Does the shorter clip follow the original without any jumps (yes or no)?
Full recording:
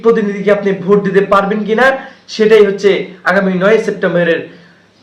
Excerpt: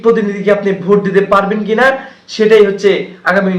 yes